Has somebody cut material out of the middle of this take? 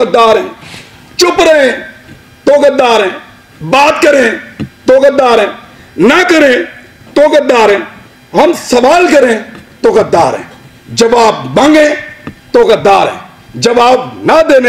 no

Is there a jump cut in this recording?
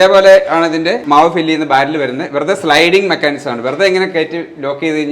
yes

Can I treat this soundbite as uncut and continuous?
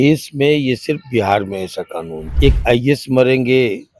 no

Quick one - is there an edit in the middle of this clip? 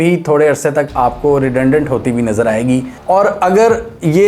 no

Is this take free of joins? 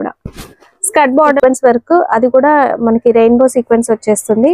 no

